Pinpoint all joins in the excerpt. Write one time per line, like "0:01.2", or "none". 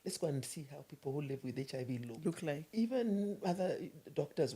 0:02.7